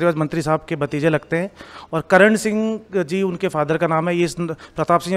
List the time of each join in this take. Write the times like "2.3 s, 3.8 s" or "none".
none